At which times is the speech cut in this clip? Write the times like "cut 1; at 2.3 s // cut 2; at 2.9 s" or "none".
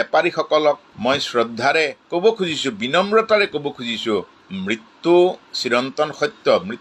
cut 1; at 4.3 s